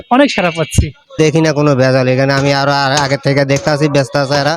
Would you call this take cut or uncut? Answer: cut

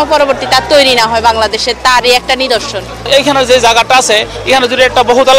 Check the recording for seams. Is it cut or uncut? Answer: cut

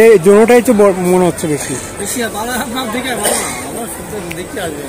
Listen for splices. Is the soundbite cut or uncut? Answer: uncut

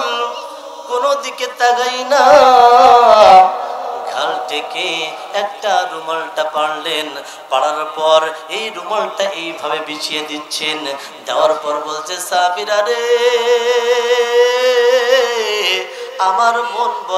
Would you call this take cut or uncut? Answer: uncut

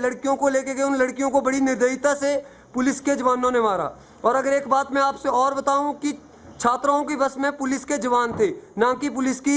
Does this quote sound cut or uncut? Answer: uncut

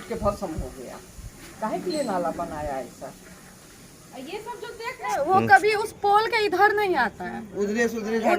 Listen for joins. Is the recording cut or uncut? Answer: cut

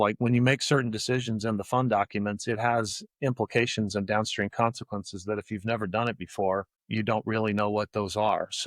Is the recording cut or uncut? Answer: cut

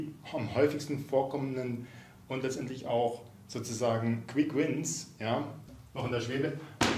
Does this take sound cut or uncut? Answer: cut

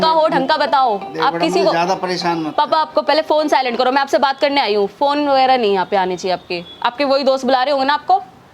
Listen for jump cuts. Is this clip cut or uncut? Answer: uncut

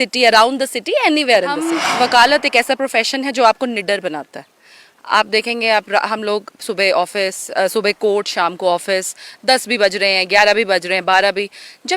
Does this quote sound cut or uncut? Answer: cut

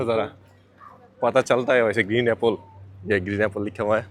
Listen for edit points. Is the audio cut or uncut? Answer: uncut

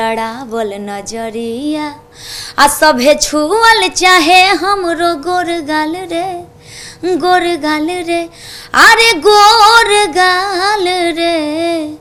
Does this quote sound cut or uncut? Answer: uncut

